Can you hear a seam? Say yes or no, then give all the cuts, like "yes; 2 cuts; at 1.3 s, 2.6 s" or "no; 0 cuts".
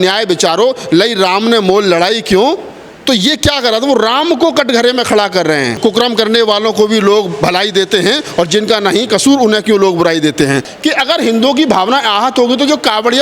yes; 1 cut; at 10.7 s